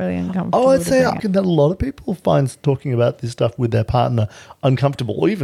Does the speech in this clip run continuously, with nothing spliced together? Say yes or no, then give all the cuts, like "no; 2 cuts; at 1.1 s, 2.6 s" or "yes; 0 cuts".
no; 1 cut; at 1.2 s